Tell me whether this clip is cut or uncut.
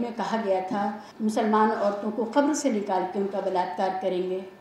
cut